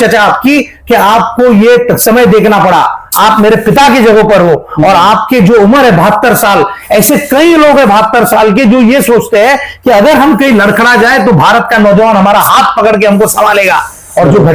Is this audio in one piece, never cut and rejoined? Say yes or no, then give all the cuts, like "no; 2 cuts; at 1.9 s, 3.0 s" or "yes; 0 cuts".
yes; 0 cuts